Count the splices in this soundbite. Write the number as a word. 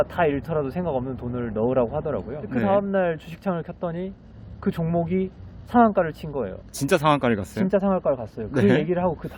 one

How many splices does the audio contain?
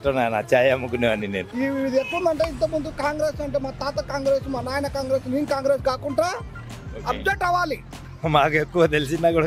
two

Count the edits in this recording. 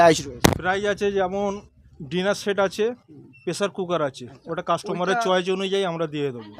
zero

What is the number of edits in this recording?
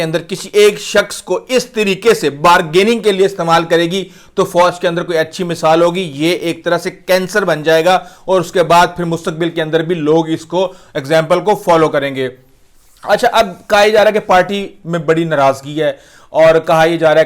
zero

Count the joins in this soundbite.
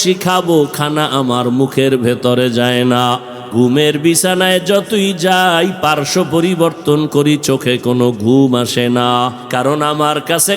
two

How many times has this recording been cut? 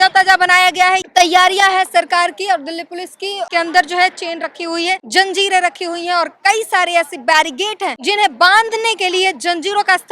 four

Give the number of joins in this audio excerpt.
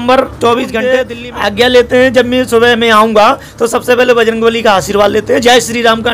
one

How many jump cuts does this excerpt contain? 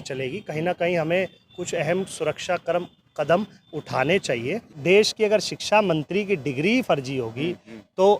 one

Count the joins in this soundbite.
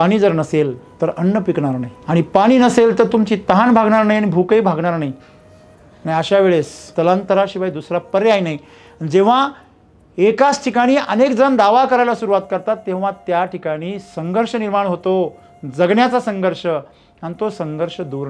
three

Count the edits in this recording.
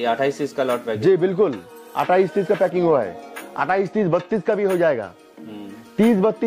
zero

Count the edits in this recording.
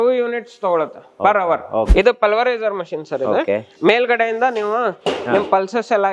one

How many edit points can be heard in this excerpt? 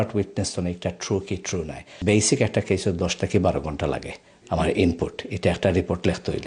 one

